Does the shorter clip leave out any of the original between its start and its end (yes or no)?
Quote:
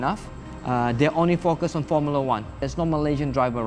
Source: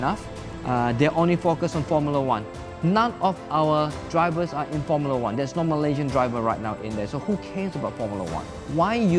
yes